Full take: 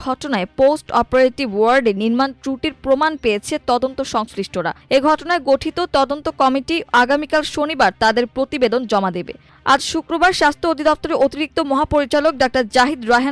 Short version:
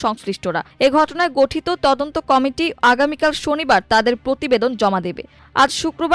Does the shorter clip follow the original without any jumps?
yes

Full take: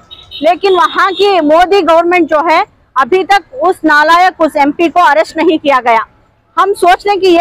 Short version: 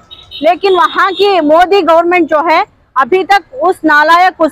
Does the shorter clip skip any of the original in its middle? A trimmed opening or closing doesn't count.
no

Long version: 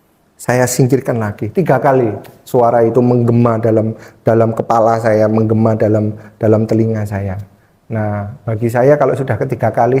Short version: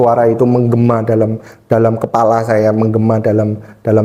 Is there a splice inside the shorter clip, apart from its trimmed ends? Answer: no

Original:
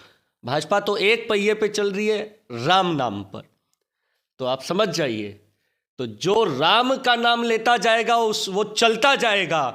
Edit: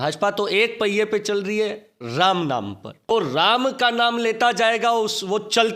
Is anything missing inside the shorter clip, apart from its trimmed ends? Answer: yes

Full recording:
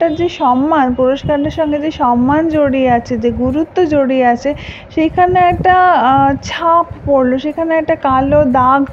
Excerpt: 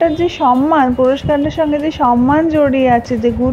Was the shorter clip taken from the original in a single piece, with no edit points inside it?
yes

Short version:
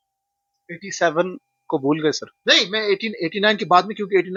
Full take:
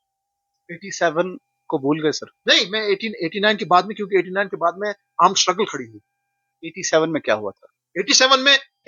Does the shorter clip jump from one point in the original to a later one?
no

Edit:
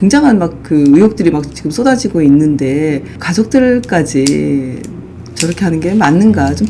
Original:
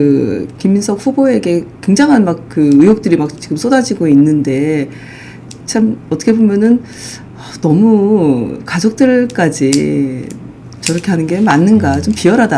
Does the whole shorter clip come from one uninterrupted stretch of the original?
no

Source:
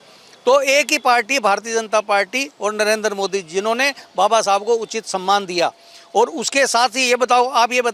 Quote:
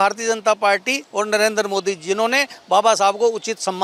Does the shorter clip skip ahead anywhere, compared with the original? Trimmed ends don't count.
no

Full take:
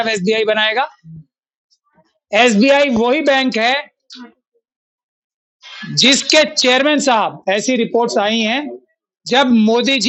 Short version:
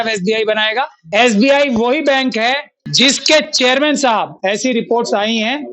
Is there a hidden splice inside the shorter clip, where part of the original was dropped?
yes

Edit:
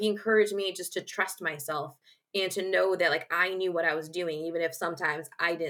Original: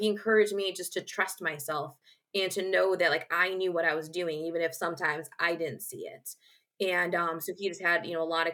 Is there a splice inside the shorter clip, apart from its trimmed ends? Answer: no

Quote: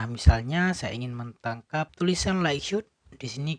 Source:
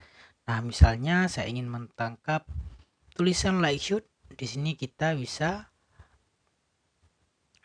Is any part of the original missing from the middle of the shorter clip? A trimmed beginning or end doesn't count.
yes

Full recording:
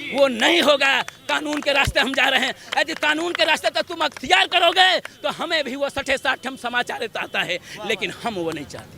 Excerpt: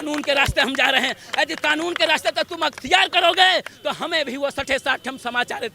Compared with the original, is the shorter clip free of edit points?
yes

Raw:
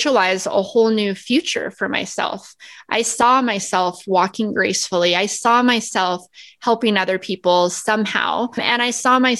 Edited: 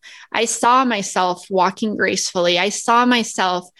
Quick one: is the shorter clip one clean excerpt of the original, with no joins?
yes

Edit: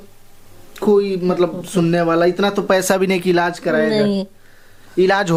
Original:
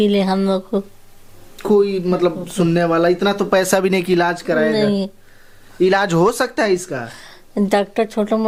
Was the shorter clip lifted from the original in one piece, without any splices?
yes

